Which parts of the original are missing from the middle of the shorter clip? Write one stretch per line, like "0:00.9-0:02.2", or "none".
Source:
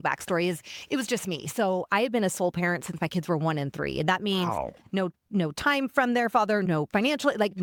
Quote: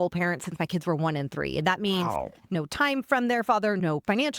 0:05.0-0:05.4